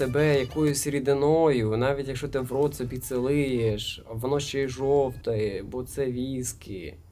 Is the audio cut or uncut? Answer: uncut